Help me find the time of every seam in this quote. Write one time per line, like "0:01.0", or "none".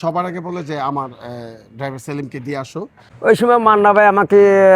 0:03.0